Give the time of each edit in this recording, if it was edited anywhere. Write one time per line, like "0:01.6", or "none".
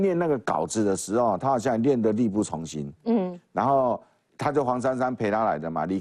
none

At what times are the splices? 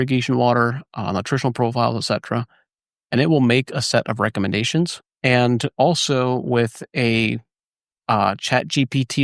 0:05.0

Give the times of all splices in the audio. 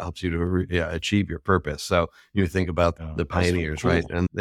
0:03.0

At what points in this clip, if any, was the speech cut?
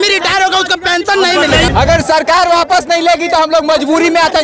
0:01.7

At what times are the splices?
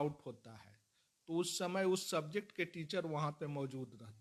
none

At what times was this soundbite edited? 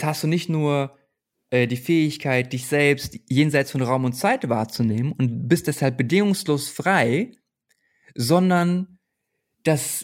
none

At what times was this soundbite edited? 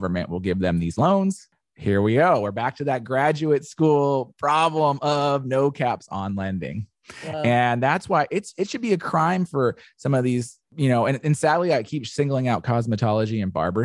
0:10.6

